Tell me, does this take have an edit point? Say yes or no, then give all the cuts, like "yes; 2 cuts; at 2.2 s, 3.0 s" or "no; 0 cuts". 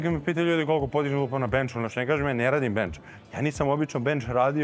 no; 0 cuts